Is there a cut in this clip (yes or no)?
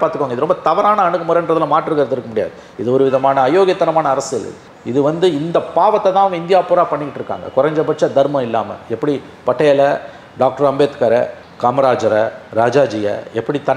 no